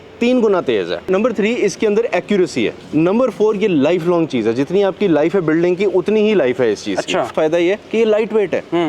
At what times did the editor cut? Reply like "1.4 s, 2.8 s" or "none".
1.1 s, 2.8 s, 7.3 s